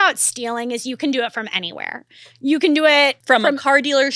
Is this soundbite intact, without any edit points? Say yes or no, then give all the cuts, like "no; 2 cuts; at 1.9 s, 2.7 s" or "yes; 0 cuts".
yes; 0 cuts